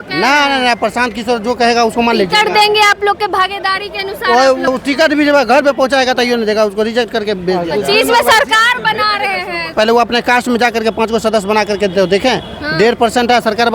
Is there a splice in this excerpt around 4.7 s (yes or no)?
yes